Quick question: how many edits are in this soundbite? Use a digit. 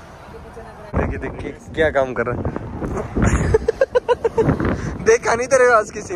1